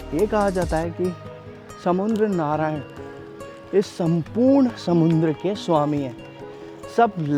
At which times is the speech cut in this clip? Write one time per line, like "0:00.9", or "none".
none